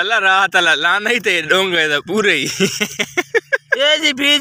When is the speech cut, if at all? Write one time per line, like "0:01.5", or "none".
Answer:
none